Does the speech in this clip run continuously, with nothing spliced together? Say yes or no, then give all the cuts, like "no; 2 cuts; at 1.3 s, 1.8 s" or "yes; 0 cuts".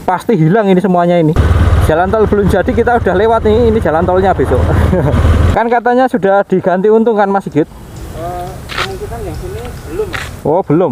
no; 2 cuts; at 1.4 s, 5.5 s